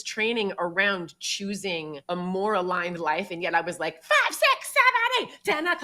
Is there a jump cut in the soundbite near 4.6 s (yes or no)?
no